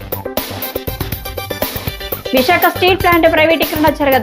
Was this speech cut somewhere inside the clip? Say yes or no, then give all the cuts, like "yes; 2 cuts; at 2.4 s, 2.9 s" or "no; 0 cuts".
yes; 2 cuts; at 1.5 s, 2.3 s